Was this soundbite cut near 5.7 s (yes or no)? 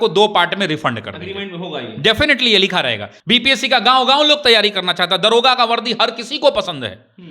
no